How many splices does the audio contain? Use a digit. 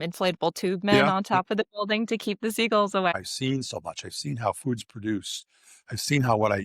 1